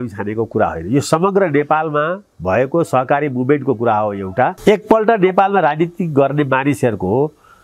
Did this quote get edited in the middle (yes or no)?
yes